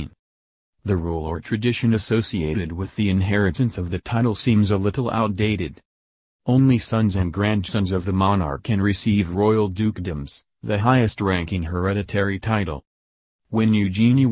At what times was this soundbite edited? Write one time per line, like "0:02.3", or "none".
none